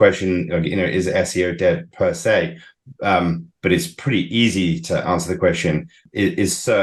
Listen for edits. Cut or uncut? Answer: uncut